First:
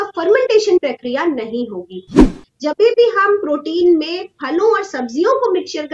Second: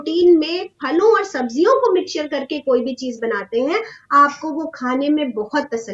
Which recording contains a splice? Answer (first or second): first